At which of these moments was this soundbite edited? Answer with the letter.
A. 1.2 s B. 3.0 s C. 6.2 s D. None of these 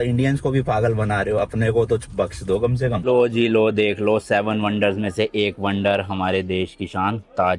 B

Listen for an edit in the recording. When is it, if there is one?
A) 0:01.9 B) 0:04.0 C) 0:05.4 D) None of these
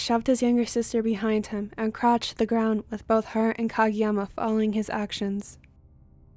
C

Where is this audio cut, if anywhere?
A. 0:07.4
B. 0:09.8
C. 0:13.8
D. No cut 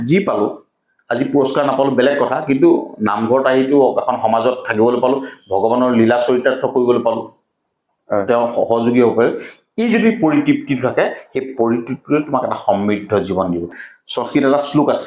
C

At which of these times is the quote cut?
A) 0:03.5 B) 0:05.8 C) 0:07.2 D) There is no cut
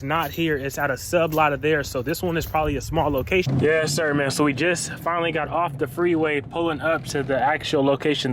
A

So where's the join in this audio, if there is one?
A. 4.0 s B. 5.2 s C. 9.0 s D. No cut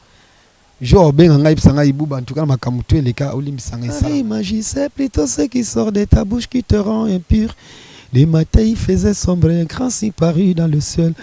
A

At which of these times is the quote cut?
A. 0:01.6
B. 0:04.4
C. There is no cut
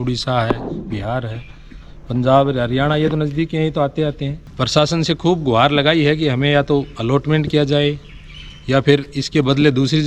B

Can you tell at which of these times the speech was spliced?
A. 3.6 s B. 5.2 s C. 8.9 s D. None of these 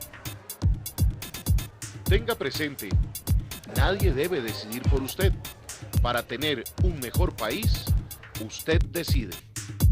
C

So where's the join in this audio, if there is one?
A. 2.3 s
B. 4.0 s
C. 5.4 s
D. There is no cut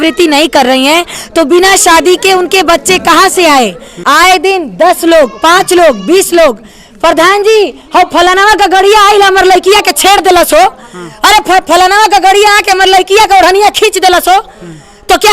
B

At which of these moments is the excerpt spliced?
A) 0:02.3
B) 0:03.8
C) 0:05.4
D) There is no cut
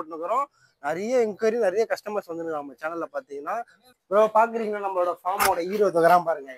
B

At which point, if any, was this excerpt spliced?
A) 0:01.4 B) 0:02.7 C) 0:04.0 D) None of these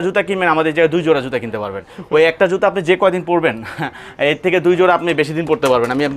D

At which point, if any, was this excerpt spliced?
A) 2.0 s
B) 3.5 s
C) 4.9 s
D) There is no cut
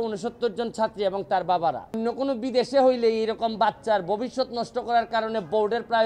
A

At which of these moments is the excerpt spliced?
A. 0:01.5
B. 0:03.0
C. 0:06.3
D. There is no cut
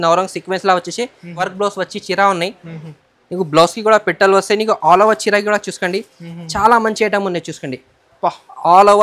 A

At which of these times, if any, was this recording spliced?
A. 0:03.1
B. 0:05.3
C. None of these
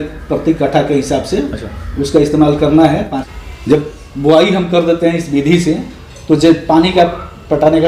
A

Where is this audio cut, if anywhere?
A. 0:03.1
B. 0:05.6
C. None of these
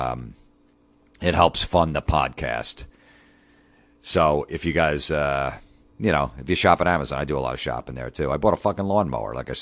B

